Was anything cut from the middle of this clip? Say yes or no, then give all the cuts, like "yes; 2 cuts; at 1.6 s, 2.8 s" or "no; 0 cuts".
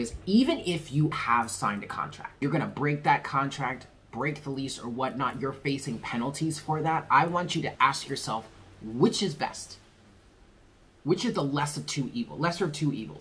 yes; 3 cuts; at 1.1 s, 2.3 s, 7.7 s